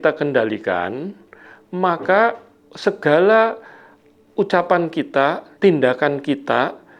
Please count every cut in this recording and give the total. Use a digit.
1